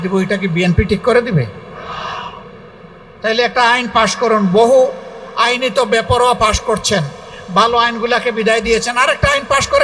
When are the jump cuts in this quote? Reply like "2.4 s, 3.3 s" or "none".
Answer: none